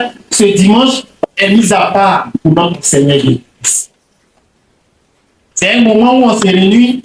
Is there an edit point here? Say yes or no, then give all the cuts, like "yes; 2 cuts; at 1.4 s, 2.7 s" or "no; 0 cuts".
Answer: no; 0 cuts